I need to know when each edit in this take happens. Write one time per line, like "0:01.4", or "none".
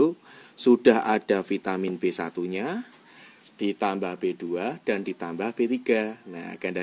none